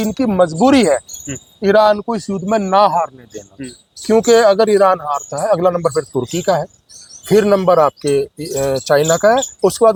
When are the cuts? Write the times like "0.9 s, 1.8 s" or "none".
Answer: none